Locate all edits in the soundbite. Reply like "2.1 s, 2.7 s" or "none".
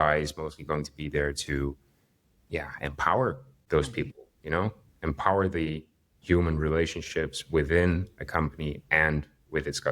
3.5 s